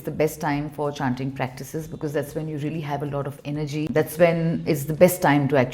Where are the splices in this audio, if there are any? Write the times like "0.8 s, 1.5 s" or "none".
3.9 s